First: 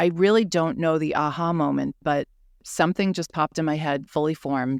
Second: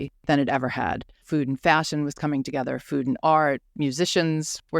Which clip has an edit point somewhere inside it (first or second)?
second